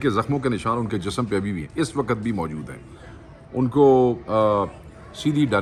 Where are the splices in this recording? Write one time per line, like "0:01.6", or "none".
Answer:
none